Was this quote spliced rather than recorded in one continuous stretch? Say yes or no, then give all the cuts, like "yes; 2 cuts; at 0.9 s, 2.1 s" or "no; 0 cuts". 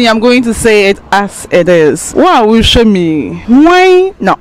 yes; 2 cuts; at 2.0 s, 3.3 s